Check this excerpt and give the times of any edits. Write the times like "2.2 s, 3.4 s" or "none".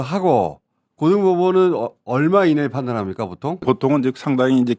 3.6 s